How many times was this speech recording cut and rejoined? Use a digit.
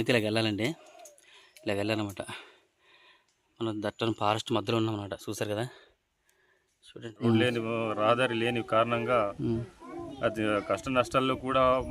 1